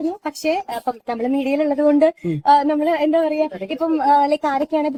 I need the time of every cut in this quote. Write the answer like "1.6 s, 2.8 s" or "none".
none